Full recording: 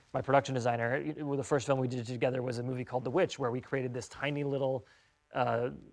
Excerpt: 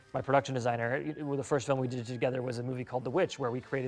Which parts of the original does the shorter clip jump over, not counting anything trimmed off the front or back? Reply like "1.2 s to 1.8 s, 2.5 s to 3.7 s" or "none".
none